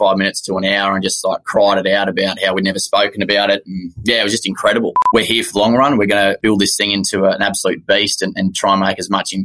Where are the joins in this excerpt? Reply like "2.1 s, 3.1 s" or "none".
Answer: 5.0 s, 6.4 s